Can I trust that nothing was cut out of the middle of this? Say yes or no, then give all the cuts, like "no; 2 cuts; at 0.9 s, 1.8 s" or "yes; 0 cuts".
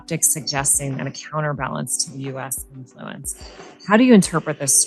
yes; 0 cuts